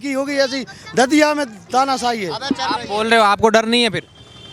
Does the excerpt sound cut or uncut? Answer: uncut